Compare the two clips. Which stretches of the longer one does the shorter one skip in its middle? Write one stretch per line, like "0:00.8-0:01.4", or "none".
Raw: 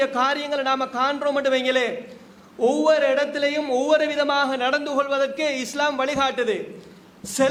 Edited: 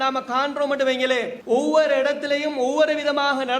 0:02.0-0:02.5